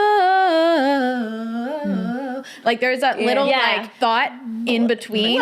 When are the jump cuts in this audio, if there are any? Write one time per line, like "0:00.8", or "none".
0:03.9